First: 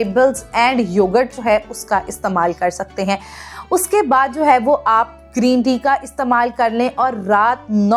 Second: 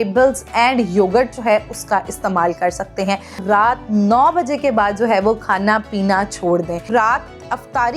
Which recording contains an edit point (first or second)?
second